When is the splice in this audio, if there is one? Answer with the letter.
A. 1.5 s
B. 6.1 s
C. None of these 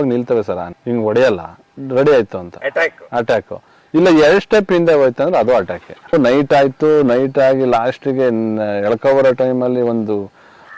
B